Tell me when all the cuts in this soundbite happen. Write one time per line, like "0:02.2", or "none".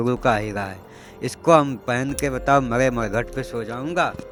none